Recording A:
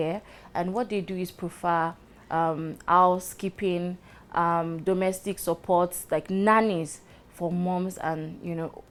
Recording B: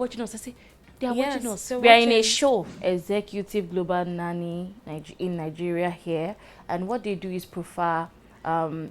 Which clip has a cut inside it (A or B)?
B